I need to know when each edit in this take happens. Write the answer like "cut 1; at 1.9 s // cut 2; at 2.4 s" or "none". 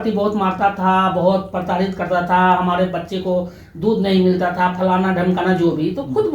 none